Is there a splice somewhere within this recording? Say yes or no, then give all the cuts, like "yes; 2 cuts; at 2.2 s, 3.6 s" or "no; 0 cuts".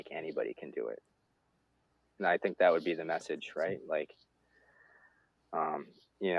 no; 0 cuts